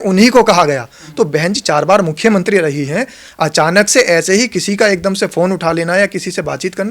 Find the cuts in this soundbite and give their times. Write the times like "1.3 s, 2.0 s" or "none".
none

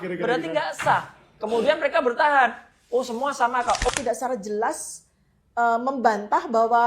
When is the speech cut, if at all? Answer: 3.9 s

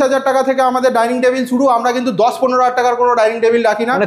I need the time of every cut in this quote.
none

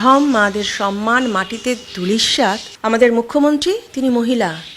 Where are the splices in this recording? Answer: 2.7 s

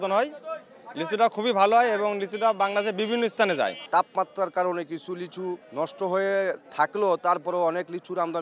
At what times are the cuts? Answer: 3.8 s, 5.6 s

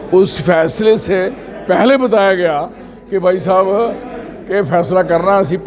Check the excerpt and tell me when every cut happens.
none

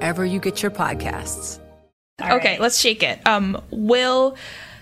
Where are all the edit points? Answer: 2.2 s

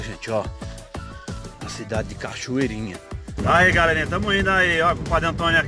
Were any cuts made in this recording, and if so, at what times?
3.4 s

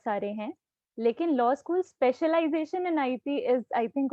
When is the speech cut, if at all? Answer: none

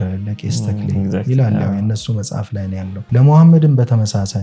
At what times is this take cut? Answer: 3.0 s

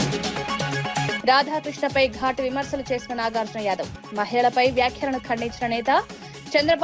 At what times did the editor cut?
1.2 s

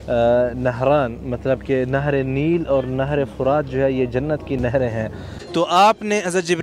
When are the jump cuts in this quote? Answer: 5.3 s

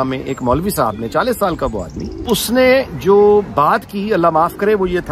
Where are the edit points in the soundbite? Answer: 2.2 s

